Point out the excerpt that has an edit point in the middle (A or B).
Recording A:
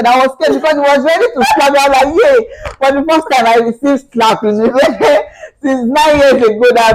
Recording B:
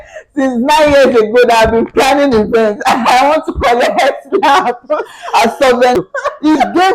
B